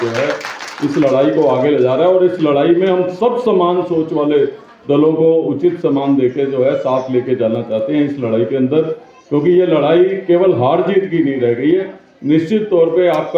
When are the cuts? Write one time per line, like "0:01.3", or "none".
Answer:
none